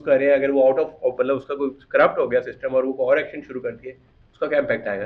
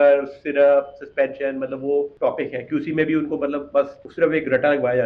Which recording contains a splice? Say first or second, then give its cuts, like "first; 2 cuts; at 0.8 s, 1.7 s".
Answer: second; 2 cuts; at 2.1 s, 4.0 s